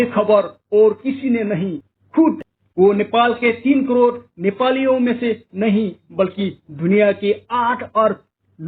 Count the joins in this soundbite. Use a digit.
1